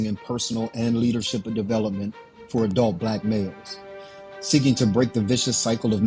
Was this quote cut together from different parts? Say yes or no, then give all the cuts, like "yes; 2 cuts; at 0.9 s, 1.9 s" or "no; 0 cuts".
yes; 1 cut; at 4.9 s